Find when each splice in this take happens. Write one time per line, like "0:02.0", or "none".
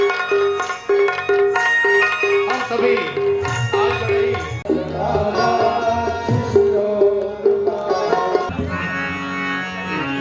0:04.6
0:08.5